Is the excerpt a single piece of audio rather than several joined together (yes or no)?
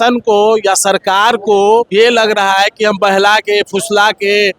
no